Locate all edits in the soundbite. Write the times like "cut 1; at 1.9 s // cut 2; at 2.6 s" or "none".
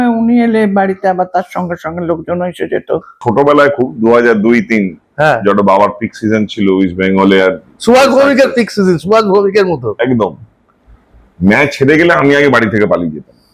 cut 1; at 3.2 s